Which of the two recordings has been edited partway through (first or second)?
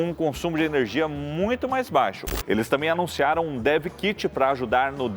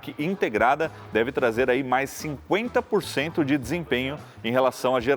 first